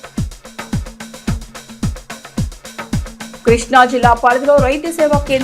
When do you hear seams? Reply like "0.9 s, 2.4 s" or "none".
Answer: 1.0 s